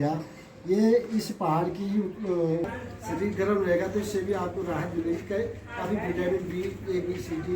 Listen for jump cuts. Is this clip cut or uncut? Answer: cut